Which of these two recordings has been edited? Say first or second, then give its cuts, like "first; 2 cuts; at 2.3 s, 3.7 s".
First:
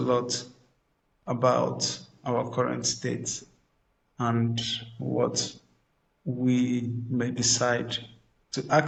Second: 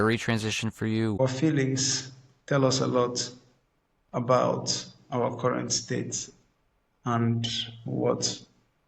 second; 1 cut; at 1.2 s